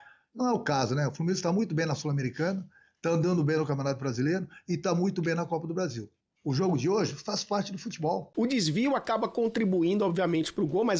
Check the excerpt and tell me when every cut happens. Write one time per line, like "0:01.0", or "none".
0:08.3

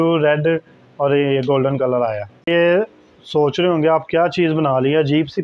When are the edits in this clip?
0:02.5

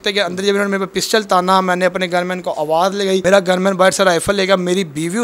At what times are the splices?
0:03.2

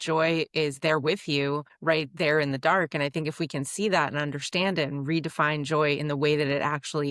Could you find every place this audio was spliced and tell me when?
0:01.7

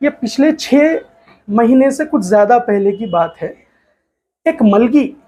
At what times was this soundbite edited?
none

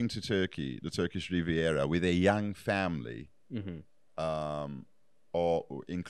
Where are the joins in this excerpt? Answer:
none

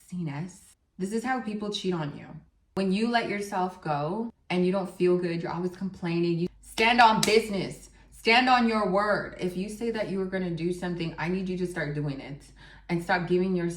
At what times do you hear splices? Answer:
0:06.5

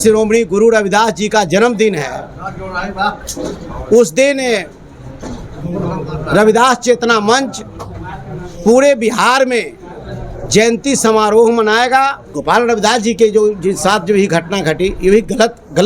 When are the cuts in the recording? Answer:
0:12.3

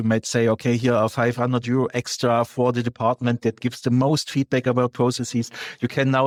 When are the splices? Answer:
none

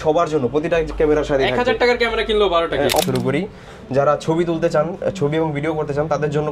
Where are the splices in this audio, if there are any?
0:03.0

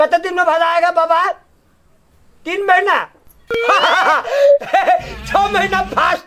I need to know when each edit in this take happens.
none

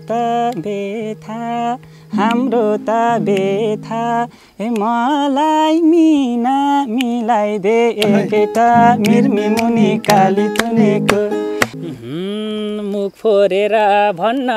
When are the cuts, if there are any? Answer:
0:11.7

